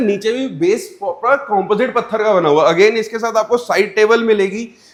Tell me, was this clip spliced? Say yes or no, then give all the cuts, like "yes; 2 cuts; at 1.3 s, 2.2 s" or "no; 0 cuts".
no; 0 cuts